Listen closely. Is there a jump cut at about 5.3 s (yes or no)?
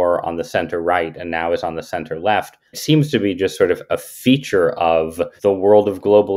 yes